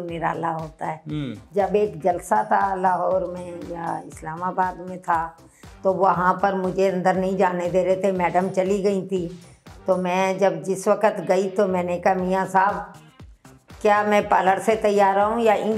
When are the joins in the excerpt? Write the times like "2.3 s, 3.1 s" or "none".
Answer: 1.3 s